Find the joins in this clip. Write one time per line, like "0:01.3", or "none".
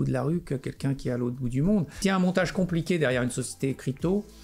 0:01.9